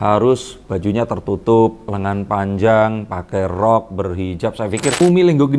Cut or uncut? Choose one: cut